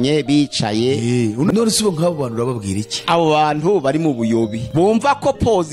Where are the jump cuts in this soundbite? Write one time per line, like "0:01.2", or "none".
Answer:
0:01.5
0:02.9
0:04.6